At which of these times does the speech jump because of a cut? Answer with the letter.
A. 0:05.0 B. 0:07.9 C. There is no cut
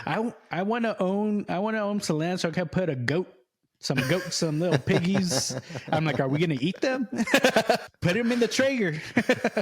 B